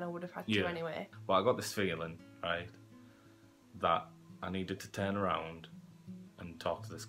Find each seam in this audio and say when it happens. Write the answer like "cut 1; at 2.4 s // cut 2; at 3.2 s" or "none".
cut 1; at 1.1 s